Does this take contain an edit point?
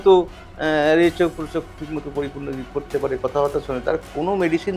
no; 0 cuts

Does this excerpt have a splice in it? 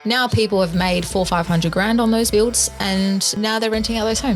yes; 2 cuts; at 2.3 s, 3.3 s

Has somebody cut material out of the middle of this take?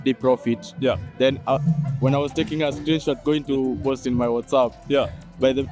no; 0 cuts

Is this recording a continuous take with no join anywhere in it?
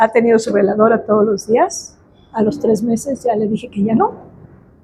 yes; 0 cuts

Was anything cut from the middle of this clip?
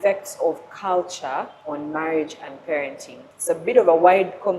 yes; 2 cuts; at 1.6 s, 3.3 s

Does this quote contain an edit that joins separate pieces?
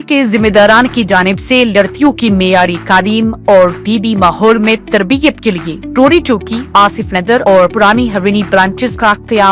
no; 0 cuts

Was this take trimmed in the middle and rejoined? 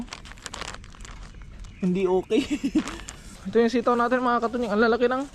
yes; 1 cut; at 3.4 s

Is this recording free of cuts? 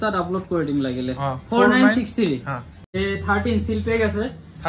no; 1 cut; at 2.9 s

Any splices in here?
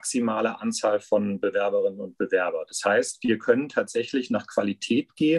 no; 0 cuts

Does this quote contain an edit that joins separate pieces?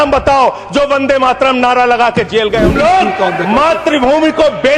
yes; 1 cut; at 2.7 s

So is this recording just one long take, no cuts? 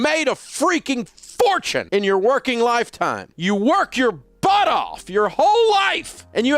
yes; 0 cuts

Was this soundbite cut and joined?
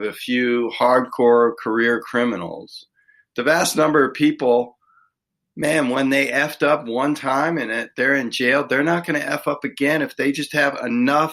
no; 0 cuts

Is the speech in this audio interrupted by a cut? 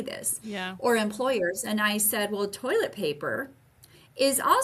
no; 0 cuts

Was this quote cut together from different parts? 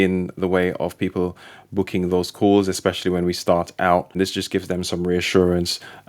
yes; 1 cut; at 4.1 s

